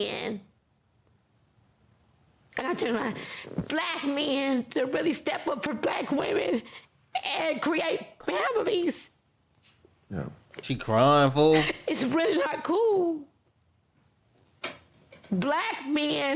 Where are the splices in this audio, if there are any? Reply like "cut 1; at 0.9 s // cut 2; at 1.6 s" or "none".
none